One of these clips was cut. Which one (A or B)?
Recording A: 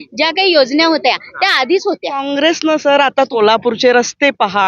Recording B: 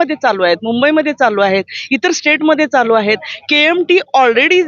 A